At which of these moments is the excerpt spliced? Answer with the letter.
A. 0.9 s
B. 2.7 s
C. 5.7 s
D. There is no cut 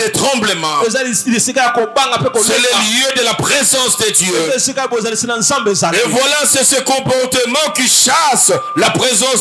D